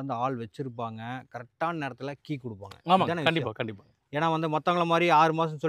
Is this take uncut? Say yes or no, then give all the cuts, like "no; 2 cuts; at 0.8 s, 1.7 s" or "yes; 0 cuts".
yes; 0 cuts